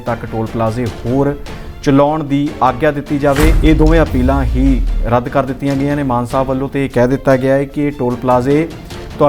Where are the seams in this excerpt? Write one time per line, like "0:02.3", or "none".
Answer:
0:03.6